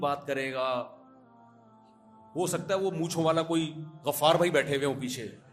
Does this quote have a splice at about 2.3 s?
yes; 2 cuts; at 1.0 s, 2.3 s

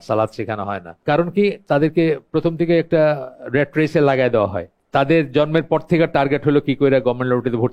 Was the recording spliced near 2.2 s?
no; 2 cuts; at 0.9 s, 4.8 s

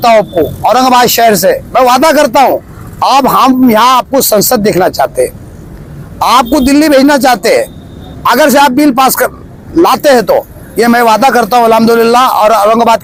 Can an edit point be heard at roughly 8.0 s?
no; 0 cuts

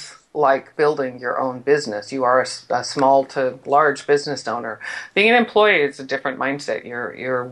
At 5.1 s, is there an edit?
no; 0 cuts

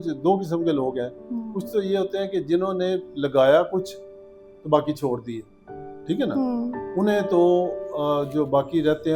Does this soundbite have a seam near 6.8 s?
no; 0 cuts

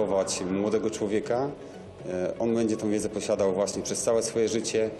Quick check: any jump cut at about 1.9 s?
no; 0 cuts

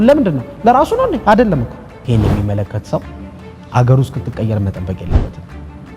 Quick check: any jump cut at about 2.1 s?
yes; 1 cut; at 2.1 s

